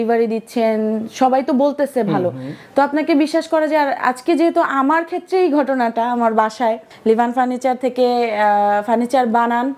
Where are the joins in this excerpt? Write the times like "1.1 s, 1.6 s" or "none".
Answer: 6.9 s